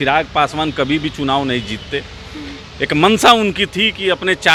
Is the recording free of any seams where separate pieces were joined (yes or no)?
yes